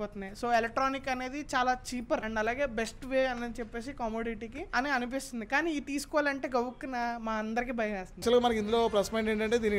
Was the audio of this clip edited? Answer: yes; 1 cut; at 8.2 s

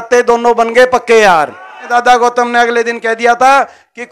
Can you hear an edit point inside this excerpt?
yes; 1 cut; at 1.9 s

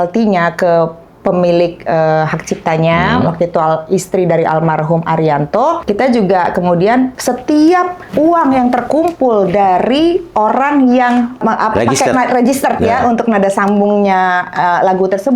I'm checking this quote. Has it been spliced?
yes; 4 cuts; at 5.8 s, 7.2 s, 8.1 s, 11.4 s

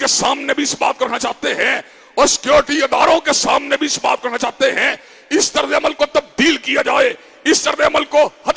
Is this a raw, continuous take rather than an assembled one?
yes; 0 cuts

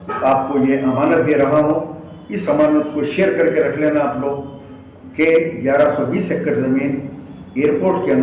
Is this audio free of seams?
yes; 0 cuts

